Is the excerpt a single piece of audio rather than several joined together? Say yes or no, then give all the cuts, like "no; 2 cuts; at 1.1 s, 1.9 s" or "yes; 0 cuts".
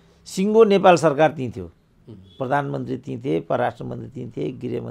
yes; 0 cuts